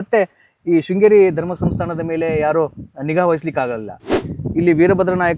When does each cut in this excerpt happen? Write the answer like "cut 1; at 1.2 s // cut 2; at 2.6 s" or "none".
cut 1; at 4.1 s